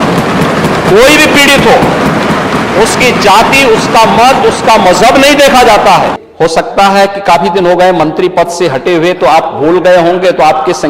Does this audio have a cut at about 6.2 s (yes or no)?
yes